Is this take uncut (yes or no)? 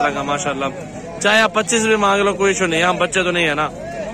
yes